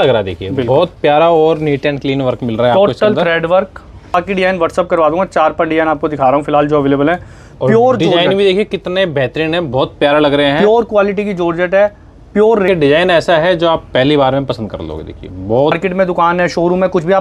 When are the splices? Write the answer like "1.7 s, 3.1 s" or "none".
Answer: 4.1 s, 12.7 s, 15.7 s